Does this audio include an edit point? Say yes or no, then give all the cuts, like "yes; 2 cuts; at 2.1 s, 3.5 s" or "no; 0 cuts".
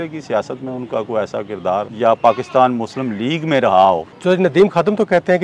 yes; 2 cuts; at 1.9 s, 4.1 s